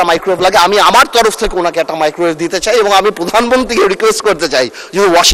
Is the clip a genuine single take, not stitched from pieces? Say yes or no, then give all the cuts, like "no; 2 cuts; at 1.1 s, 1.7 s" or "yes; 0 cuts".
yes; 0 cuts